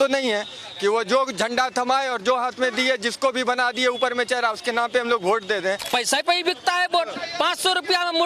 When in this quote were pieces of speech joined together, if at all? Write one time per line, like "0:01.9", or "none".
0:05.8